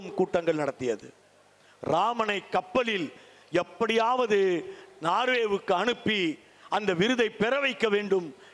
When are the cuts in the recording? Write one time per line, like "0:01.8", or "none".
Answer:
none